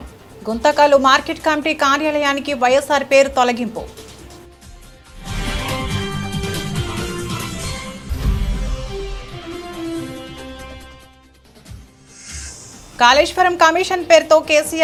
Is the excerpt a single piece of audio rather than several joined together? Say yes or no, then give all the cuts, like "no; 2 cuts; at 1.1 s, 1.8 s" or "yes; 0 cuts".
yes; 0 cuts